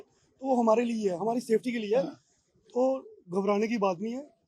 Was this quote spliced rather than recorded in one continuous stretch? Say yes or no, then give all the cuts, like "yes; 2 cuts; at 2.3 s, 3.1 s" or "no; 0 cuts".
no; 0 cuts